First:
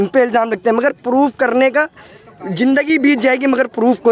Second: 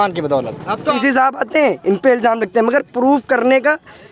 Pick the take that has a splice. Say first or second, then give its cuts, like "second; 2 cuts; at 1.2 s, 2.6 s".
second; 1 cut; at 1.0 s